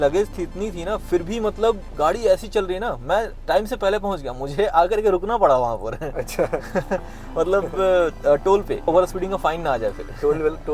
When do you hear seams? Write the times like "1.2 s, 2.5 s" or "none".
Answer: 8.9 s